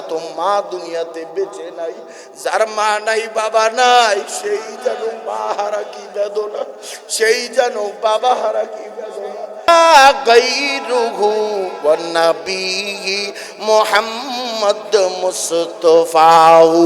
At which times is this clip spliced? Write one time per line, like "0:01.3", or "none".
0:09.7